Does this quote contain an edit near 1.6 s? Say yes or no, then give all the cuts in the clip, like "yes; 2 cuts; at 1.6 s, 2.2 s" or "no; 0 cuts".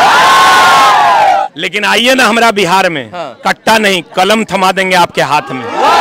yes; 1 cut; at 1.6 s